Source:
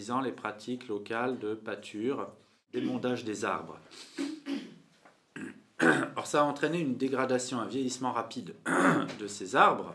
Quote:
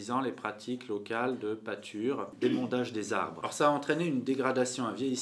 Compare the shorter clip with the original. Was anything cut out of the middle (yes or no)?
yes